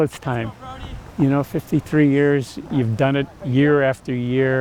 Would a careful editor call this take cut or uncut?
uncut